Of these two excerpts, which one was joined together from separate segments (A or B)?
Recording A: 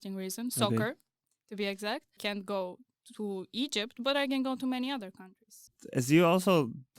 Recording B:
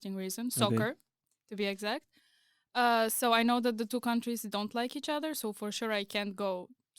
A